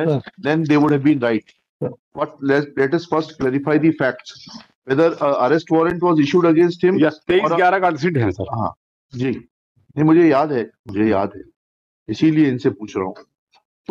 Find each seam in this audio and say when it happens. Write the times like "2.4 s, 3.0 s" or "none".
none